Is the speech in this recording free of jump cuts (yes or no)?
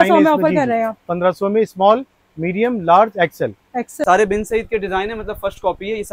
no